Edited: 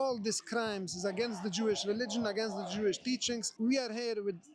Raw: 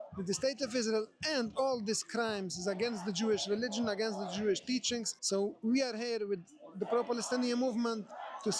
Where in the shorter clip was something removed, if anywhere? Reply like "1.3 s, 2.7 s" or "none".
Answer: 3.5 s